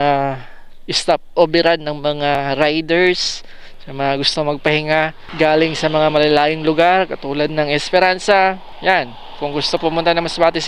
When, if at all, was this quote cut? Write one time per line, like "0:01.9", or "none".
0:05.2
0:08.7